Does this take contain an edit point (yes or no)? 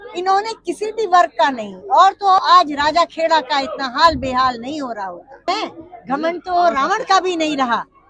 yes